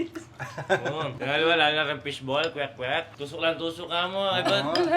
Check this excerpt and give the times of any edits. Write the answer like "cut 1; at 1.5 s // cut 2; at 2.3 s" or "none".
cut 1; at 1.2 s // cut 2; at 3.2 s